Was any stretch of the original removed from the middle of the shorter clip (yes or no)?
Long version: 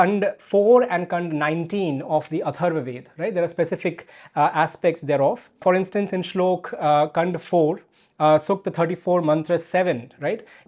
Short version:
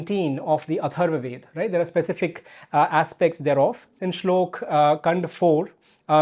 yes